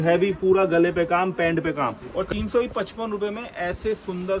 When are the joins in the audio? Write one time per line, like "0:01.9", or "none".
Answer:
0:02.1